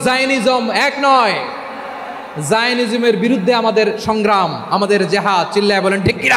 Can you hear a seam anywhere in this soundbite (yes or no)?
no